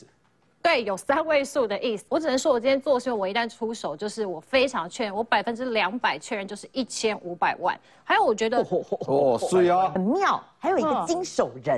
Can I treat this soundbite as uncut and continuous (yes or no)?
no